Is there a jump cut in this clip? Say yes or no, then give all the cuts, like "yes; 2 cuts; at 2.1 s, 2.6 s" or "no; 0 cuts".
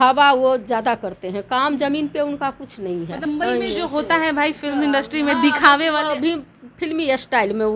yes; 1 cut; at 3.3 s